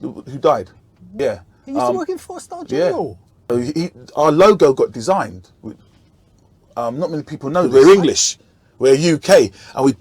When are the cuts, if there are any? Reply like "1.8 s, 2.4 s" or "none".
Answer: 7.7 s